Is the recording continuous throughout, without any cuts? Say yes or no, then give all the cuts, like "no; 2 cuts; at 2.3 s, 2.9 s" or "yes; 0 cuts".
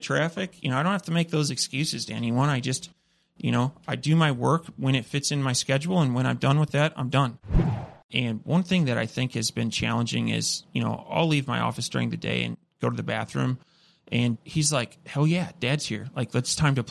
no; 1 cut; at 7.7 s